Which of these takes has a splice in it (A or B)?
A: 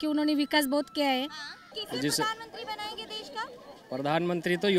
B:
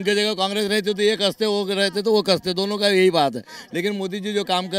A